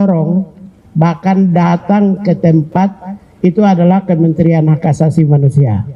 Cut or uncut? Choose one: uncut